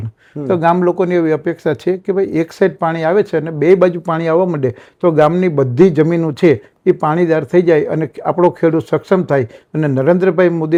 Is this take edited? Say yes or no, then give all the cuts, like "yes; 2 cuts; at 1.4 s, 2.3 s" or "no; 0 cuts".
no; 0 cuts